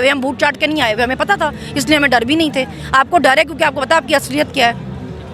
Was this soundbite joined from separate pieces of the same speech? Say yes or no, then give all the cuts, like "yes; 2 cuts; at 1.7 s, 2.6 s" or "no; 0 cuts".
no; 0 cuts